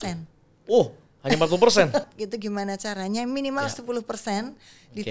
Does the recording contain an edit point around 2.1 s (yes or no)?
yes